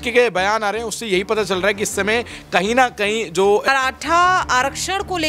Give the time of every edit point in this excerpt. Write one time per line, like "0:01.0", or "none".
0:03.7